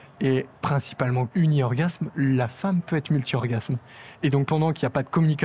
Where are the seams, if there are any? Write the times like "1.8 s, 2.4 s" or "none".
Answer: 1.0 s, 4.5 s